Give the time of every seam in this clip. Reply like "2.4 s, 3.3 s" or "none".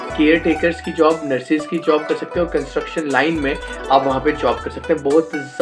none